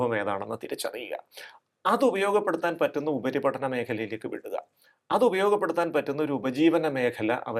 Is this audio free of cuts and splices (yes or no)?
yes